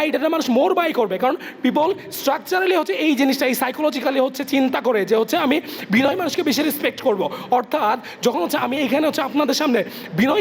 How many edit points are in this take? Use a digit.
0